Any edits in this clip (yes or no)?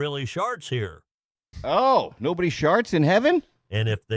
no